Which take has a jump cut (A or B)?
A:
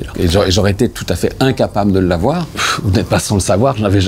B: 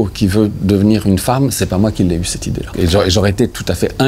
A